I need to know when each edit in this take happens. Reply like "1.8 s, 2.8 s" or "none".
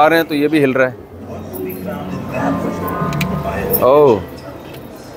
none